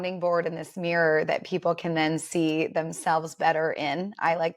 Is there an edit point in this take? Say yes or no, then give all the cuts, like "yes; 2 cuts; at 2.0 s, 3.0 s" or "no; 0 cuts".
no; 0 cuts